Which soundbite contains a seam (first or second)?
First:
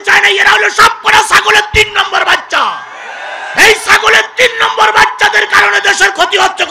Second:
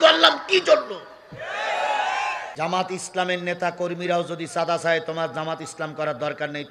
second